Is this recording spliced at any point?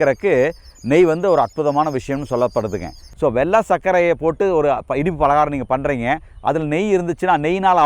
yes; 1 cut; at 3.0 s

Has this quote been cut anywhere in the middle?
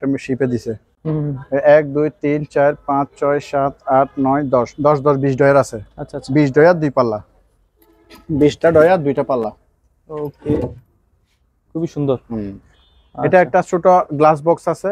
no; 0 cuts

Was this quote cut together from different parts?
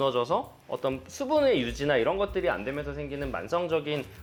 no; 0 cuts

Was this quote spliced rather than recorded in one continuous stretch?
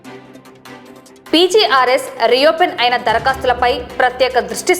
yes; 1 cut; at 1.3 s

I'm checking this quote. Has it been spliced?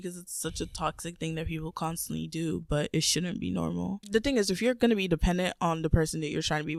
no; 0 cuts

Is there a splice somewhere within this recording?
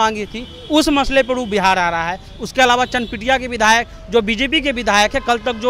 no; 0 cuts

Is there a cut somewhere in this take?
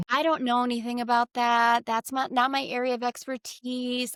no; 0 cuts

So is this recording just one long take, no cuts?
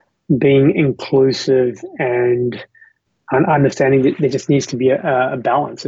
no; 1 cut; at 3.0 s

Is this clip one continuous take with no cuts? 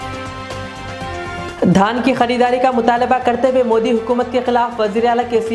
no; 1 cut; at 1.3 s

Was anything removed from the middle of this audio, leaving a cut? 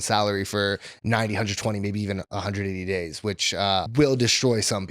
yes; 1 cut; at 3.9 s

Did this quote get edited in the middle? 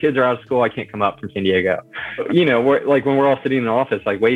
yes; 1 cut; at 2.2 s

